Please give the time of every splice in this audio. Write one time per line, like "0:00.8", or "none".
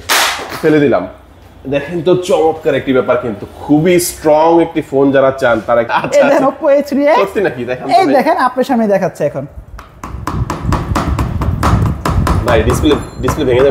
0:05.9